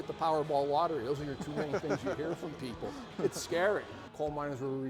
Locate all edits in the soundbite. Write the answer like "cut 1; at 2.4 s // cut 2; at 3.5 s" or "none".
cut 1; at 4.0 s